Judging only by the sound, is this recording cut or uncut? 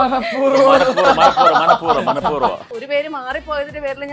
cut